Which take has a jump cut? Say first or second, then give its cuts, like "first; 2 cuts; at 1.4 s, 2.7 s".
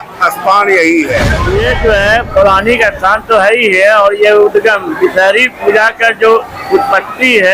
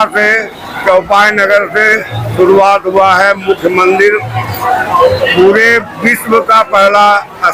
first; 1 cut; at 1.4 s